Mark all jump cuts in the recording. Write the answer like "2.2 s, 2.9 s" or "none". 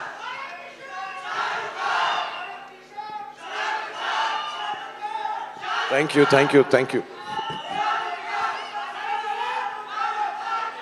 none